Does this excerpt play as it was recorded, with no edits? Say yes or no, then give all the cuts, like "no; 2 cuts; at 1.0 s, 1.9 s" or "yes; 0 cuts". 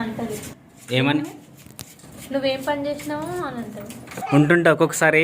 no; 1 cut; at 4.1 s